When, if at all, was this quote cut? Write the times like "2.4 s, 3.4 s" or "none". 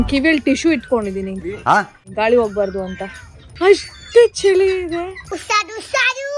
1.3 s, 2.0 s, 3.5 s